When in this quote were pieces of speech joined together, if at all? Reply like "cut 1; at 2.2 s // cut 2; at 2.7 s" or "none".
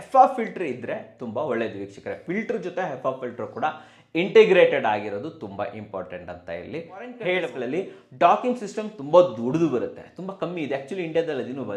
cut 1; at 7.5 s